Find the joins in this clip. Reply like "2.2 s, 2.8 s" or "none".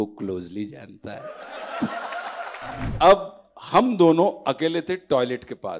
2.9 s

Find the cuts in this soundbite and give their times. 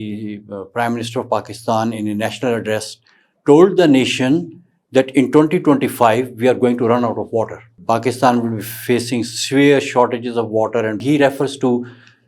7.7 s, 11.0 s

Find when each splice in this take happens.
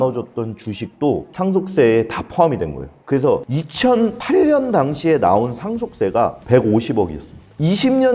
none

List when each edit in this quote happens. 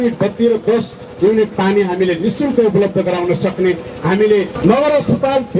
4.5 s

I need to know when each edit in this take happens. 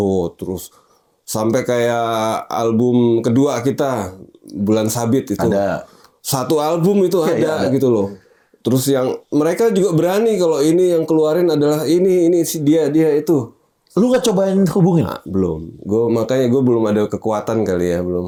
none

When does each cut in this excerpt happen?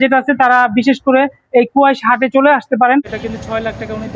3.1 s

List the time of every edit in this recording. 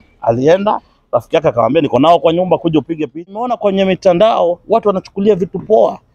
3.5 s

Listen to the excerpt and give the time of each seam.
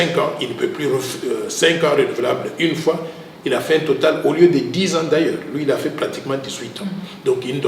none

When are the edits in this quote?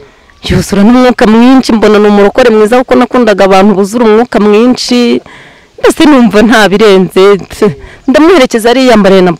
none

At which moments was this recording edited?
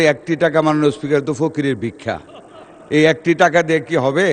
none

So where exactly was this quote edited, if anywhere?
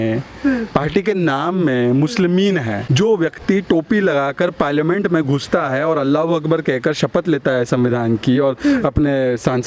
2.8 s

